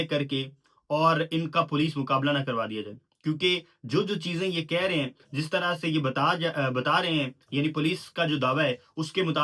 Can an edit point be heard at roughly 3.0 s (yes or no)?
no